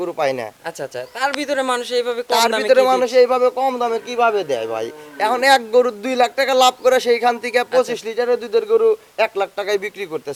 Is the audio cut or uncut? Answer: uncut